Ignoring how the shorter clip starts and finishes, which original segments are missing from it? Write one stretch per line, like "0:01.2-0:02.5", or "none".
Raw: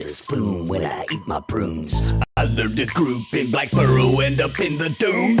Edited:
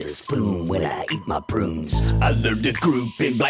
0:02.2-0:02.3